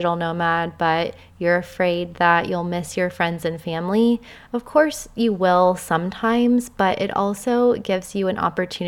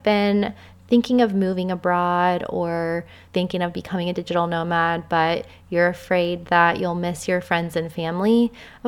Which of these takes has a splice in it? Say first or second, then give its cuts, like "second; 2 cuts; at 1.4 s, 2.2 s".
second; 1 cut; at 3.2 s